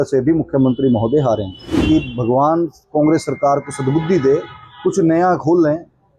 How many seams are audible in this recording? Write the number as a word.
one